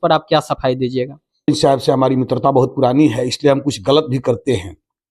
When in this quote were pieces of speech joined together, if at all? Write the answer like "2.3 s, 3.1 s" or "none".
1.5 s